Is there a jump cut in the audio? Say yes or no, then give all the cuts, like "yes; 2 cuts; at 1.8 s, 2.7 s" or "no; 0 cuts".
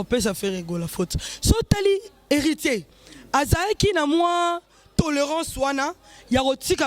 no; 0 cuts